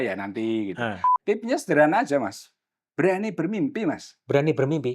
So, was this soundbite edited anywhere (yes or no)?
yes